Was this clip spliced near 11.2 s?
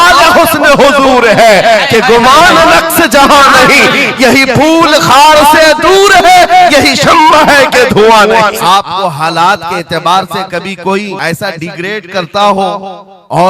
yes; 2 cuts; at 8.6 s, 11.2 s

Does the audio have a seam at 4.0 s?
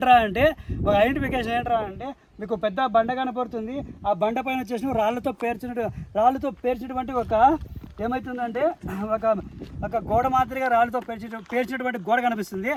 no; 0 cuts

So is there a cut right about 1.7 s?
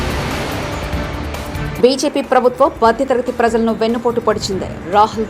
yes; 1 cut; at 1.7 s

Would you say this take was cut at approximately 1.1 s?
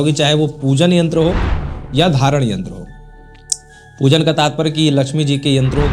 no; 0 cuts

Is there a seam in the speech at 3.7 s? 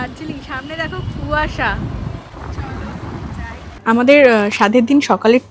yes; 2 cuts; at 2.3 s, 3.7 s

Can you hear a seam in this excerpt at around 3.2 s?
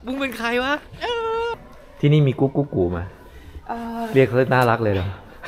no; 1 cut; at 1.6 s

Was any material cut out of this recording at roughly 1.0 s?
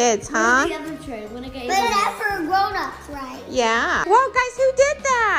no; 1 cut; at 4.0 s

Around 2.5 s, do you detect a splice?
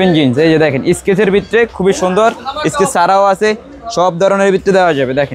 no; 0 cuts

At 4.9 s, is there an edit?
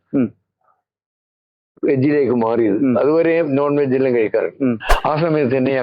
yes; 1 cut; at 4.9 s

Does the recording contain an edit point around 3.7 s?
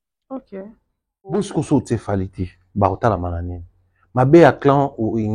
no; 1 cut; at 1.3 s

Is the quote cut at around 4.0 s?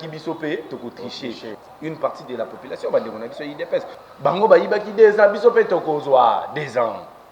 yes; 2 cuts; at 1.5 s, 4.0 s

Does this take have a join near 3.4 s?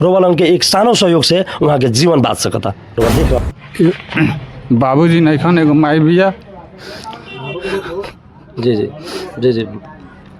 yes; 1 cut; at 3.4 s

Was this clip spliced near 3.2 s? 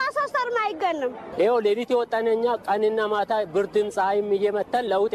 no; 1 cut; at 1.2 s

